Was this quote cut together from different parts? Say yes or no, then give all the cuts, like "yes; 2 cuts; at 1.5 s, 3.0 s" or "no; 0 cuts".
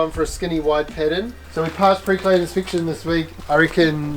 yes; 1 cut; at 1.4 s